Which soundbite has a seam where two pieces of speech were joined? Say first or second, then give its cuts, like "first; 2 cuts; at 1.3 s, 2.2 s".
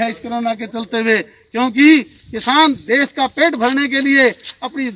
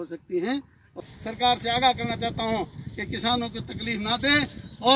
second; 1 cut; at 1.1 s